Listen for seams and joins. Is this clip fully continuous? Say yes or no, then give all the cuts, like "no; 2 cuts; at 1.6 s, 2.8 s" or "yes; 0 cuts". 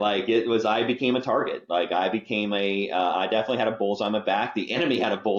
yes; 0 cuts